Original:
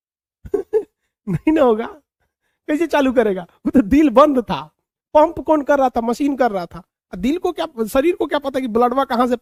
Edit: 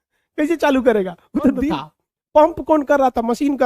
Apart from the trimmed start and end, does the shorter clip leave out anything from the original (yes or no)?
yes